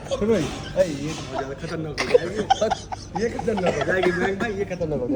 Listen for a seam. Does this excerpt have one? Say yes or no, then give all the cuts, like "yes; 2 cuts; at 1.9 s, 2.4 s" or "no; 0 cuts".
no; 0 cuts